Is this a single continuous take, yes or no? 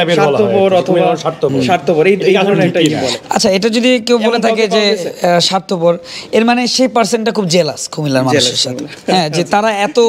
yes